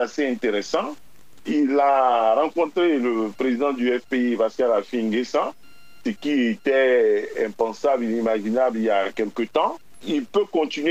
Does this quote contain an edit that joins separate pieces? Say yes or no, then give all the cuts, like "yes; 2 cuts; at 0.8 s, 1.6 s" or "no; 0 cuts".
yes; 1 cut; at 9.9 s